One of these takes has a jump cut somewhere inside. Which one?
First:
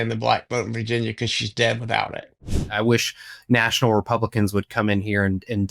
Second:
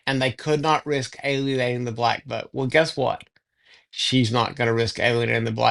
first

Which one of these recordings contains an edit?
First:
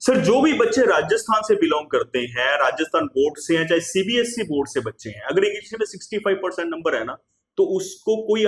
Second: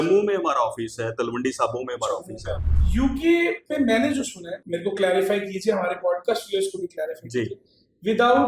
second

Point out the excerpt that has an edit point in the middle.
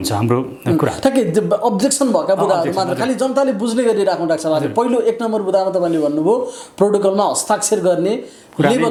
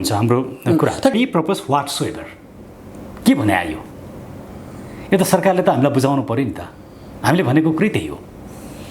second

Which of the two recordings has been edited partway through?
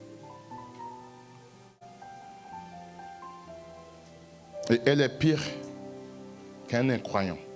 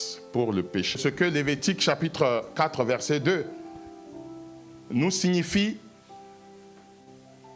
second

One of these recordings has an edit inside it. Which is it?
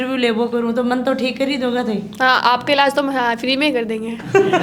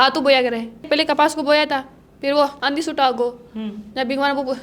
second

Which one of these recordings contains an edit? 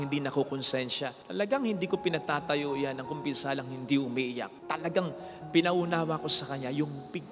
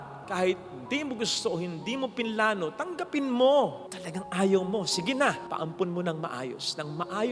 second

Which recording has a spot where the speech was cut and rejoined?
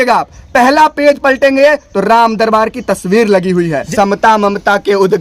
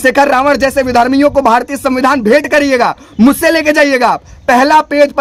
first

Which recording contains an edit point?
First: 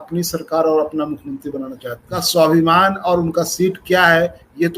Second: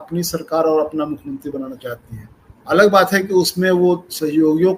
first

